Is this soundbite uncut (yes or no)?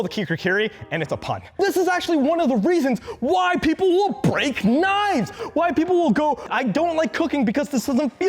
no